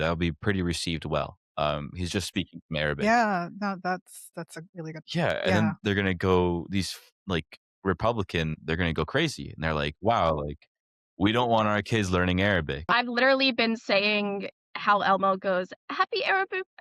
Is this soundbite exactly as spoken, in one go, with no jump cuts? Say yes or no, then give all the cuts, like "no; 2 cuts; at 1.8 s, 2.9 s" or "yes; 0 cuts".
no; 1 cut; at 12.9 s